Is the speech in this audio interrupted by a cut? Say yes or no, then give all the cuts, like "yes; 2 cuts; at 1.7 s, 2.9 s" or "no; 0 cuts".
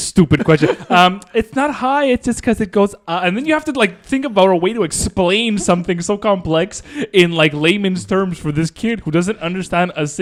no; 0 cuts